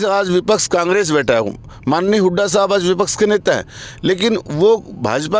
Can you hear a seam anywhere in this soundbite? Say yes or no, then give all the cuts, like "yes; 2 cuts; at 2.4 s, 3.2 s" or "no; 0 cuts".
no; 0 cuts